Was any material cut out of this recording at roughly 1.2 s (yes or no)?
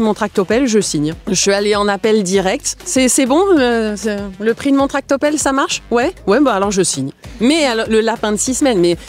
yes